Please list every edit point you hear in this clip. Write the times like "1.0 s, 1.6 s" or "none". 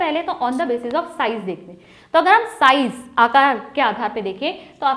none